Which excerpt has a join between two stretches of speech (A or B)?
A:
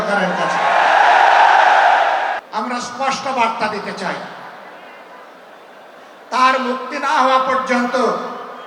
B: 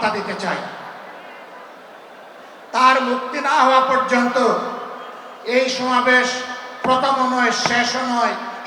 A